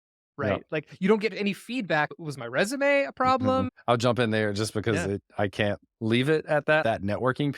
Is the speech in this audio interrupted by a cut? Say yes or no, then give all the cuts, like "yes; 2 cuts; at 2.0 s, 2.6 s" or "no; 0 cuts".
yes; 3 cuts; at 2.1 s, 3.7 s, 6.8 s